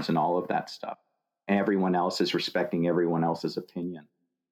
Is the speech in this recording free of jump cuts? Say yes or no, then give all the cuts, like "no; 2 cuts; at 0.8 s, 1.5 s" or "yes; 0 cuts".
yes; 0 cuts